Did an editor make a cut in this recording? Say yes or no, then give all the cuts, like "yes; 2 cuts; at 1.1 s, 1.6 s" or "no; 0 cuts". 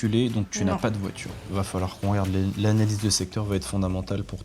yes; 1 cut; at 1.4 s